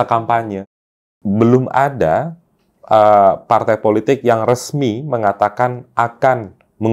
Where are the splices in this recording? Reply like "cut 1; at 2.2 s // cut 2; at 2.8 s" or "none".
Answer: cut 1; at 1.1 s

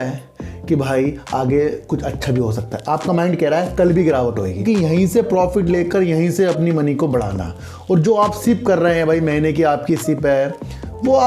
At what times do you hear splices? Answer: cut 1; at 4.6 s

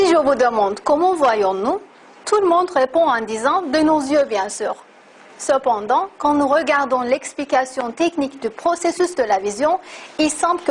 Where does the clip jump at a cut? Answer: cut 1; at 3.7 s

